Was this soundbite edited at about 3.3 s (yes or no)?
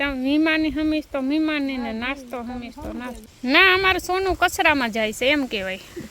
yes